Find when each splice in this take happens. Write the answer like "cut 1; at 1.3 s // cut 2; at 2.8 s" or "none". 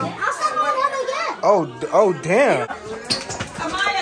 cut 1; at 2.7 s